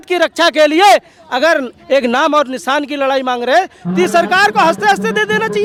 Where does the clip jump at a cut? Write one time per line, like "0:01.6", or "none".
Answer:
none